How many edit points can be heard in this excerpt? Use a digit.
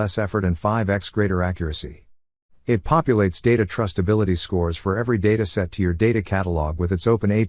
0